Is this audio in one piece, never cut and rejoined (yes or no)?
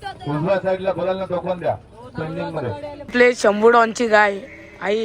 no